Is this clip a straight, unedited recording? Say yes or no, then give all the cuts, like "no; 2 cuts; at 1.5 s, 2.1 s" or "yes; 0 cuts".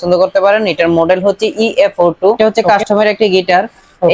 no; 1 cut; at 2.4 s